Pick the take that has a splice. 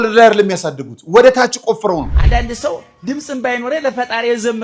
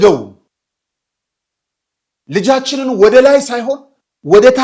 first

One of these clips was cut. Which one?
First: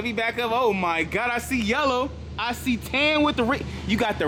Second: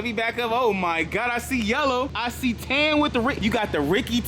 second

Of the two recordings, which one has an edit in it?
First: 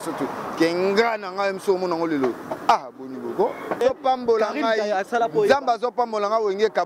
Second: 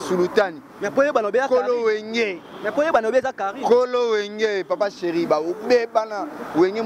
first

